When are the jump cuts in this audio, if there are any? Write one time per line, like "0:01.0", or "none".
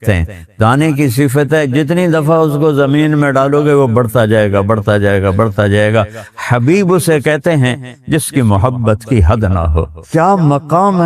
0:10.0